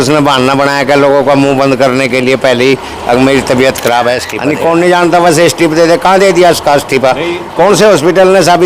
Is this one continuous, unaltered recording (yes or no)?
no